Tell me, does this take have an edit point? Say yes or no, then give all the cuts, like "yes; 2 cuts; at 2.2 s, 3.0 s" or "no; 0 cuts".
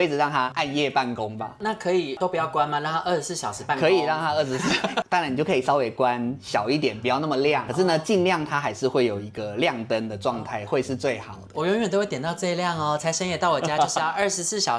no; 0 cuts